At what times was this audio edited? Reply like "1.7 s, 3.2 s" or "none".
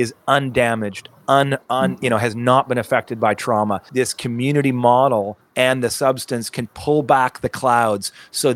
3.9 s